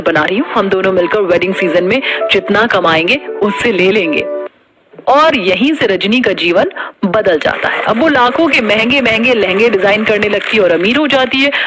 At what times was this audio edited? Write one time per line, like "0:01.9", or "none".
none